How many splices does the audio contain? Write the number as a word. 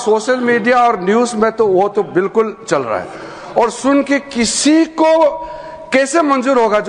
zero